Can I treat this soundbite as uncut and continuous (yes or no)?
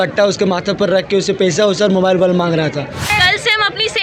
no